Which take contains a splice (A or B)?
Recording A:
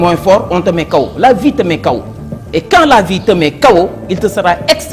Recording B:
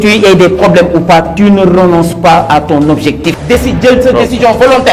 B